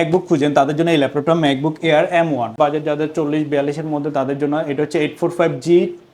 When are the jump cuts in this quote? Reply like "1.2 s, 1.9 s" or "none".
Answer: 2.5 s